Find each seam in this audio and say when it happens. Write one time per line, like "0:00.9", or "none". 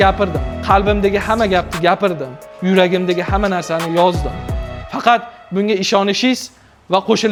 none